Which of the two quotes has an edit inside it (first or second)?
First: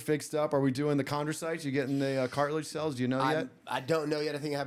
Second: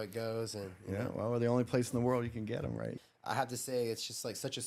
second